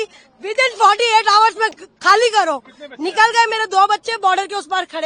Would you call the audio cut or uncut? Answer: uncut